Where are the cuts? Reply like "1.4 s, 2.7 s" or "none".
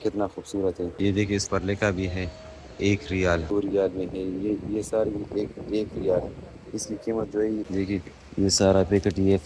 1.0 s, 3.5 s, 7.7 s